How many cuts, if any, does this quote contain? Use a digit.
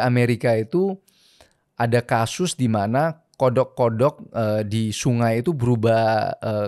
0